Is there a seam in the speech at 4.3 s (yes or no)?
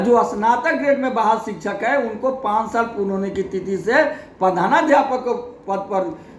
no